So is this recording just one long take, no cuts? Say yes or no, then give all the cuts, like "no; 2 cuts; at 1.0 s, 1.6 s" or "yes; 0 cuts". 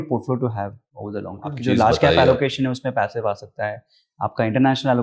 no; 1 cut; at 1.6 s